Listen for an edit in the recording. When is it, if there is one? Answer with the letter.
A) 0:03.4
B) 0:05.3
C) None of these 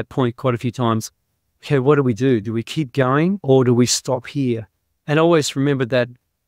A